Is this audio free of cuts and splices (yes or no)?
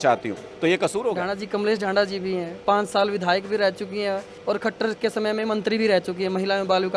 no